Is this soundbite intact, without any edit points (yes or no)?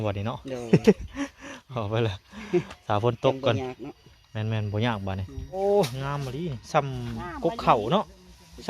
no